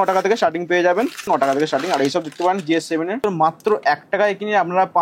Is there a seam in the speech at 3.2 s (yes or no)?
yes